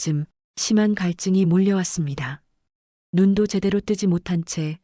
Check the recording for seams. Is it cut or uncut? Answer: uncut